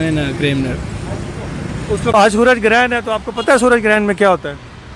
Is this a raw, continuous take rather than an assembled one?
no; 1 cut; at 2.1 s

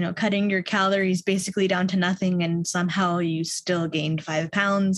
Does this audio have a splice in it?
no; 0 cuts

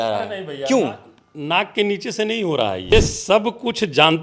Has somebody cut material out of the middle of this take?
yes; 1 cut; at 2.9 s

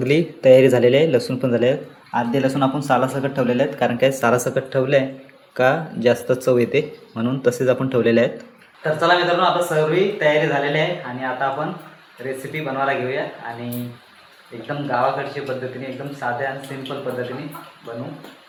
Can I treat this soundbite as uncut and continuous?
yes; 0 cuts

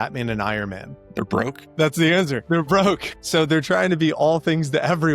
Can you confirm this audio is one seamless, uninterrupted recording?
no; 1 cut; at 1.1 s

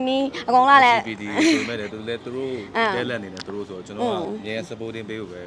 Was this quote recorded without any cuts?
yes; 0 cuts

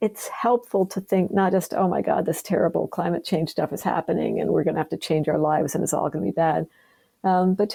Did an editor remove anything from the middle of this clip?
no; 0 cuts

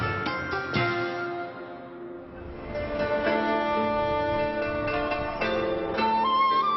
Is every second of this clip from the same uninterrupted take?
yes; 0 cuts

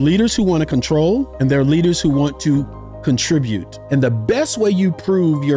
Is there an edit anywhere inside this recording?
yes; 2 cuts; at 1.3 s, 3.7 s

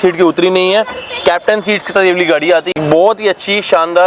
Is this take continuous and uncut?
yes; 0 cuts

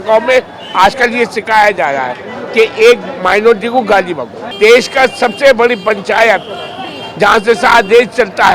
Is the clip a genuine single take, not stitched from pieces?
no; 1 cut; at 4.5 s

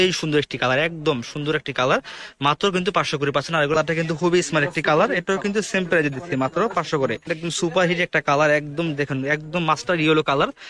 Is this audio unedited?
no; 2 cuts; at 3.7 s, 7.3 s

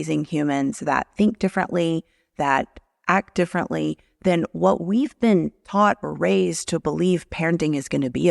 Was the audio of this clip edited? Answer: no; 0 cuts

